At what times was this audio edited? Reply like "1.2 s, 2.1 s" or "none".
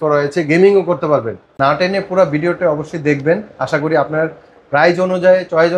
1.5 s